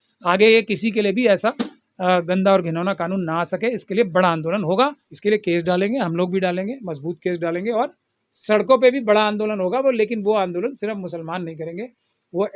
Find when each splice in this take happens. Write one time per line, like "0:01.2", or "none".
0:05.1